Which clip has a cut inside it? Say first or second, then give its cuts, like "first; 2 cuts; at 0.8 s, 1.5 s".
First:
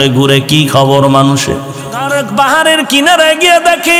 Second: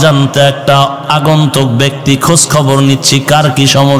first; 1 cut; at 2.1 s